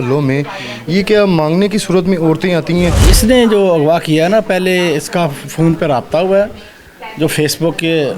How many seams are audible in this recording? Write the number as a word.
one